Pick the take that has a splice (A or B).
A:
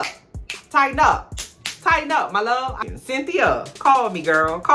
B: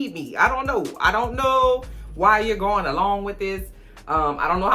A